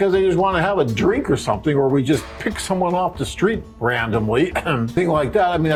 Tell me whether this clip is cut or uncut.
uncut